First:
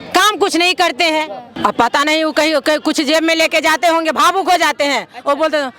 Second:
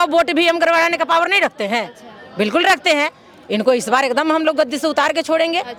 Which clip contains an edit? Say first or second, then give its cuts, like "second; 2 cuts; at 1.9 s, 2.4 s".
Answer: first; 1 cut; at 1.5 s